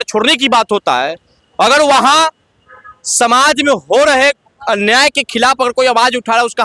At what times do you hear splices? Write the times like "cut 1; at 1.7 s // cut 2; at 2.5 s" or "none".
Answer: none